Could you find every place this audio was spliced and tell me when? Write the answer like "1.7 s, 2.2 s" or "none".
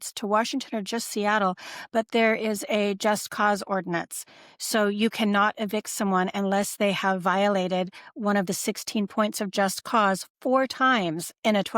none